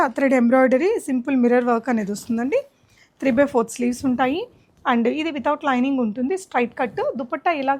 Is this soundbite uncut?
yes; 0 cuts

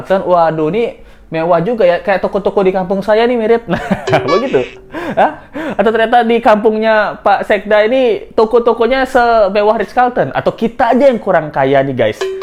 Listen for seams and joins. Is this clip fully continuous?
yes; 0 cuts

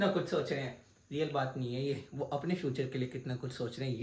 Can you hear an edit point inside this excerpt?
no; 0 cuts

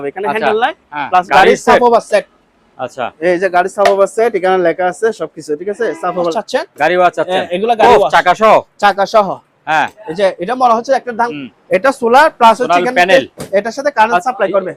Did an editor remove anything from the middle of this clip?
yes; 3 cuts; at 1.3 s, 6.3 s, 11.3 s

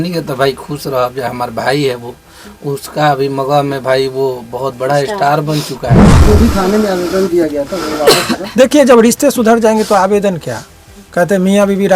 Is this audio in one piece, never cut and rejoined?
no; 1 cut; at 6.2 s

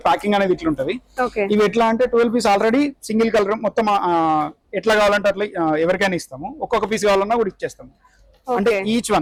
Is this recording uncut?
yes; 0 cuts

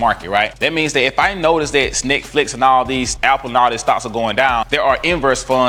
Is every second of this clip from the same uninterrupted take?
yes; 0 cuts

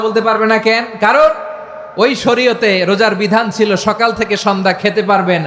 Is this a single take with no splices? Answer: yes; 0 cuts

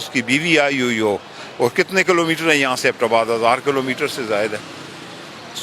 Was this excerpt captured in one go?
yes; 0 cuts

